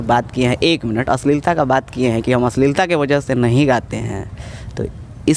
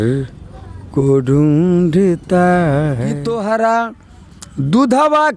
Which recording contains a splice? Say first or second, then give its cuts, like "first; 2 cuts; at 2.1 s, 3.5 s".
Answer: second; 1 cut; at 3.2 s